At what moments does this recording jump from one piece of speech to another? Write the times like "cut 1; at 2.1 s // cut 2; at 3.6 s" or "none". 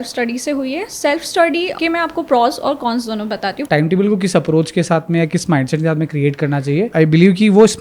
cut 1; at 1.7 s // cut 2; at 3.6 s // cut 3; at 6.9 s